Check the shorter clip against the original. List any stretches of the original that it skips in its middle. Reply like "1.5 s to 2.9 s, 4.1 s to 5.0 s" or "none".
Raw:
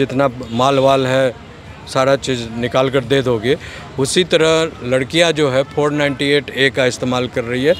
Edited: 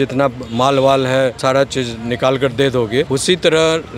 1.4 s to 1.9 s, 3.6 s to 4.0 s